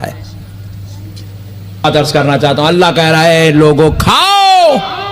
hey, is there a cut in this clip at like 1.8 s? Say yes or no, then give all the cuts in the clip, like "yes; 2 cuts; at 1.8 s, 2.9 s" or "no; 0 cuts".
yes; 1 cut; at 1.8 s